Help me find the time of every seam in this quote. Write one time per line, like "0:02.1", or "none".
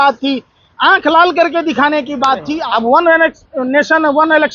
0:02.5